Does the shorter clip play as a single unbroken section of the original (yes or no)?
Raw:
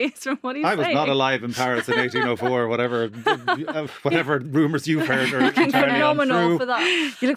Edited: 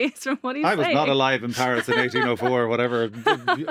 yes